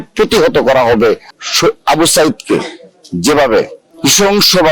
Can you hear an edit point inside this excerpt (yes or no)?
yes